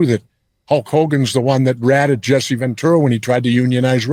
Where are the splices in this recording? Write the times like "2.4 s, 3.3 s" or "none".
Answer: none